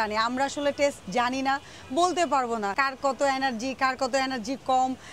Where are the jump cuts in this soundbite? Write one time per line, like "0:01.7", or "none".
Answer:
0:02.7